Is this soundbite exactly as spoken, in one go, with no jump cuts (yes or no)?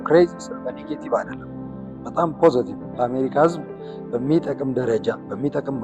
yes